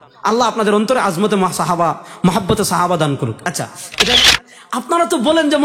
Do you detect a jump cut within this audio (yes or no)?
yes